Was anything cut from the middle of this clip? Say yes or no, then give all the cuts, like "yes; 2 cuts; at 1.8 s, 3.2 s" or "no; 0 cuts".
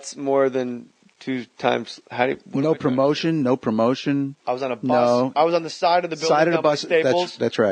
no; 0 cuts